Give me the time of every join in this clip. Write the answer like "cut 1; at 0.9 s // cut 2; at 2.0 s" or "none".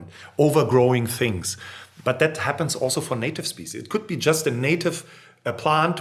none